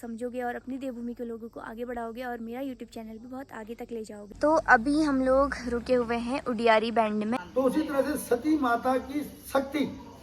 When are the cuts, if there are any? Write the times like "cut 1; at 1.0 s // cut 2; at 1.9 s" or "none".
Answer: cut 1; at 4.3 s // cut 2; at 7.4 s